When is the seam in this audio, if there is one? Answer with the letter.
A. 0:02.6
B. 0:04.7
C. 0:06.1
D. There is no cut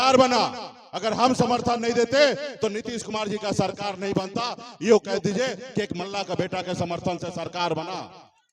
D